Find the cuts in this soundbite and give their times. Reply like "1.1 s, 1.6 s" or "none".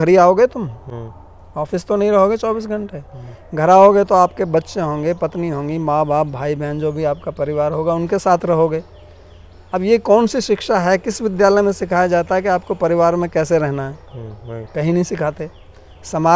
none